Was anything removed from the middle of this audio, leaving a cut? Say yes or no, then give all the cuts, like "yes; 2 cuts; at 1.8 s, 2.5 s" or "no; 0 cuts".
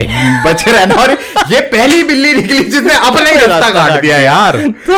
no; 0 cuts